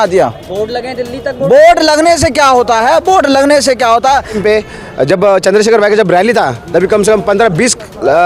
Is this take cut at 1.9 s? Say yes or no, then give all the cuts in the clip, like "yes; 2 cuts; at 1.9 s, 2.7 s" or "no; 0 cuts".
no; 1 cut; at 4.4 s